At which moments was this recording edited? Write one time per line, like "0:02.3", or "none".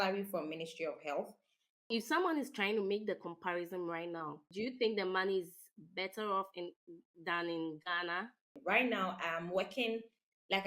0:01.9
0:04.5
0:08.6

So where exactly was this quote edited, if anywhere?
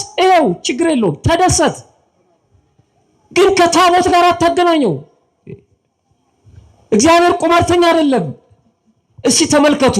none

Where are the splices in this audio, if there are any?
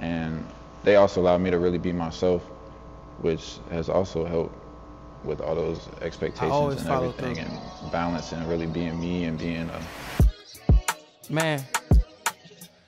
0:09.9

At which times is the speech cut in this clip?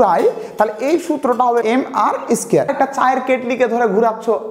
0:01.6
0:02.7

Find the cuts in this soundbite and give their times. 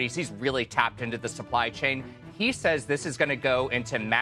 none

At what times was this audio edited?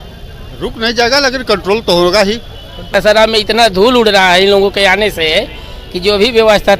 0:03.0

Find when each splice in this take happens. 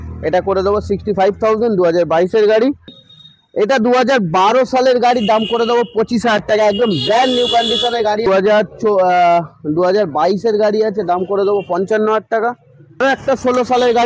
0:02.9
0:08.3
0:13.0

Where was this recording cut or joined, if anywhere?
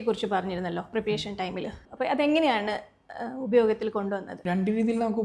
0:01.8
0:04.3

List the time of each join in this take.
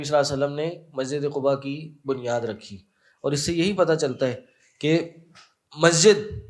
none

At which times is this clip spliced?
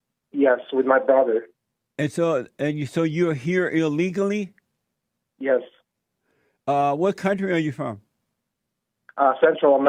none

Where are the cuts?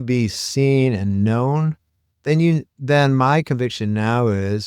none

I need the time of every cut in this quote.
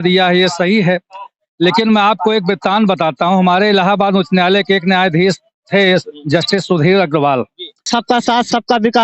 0:07.8

